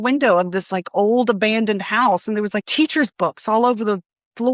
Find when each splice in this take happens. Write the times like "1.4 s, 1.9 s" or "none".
2.7 s